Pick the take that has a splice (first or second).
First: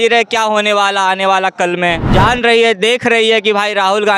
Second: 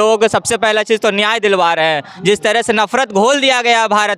first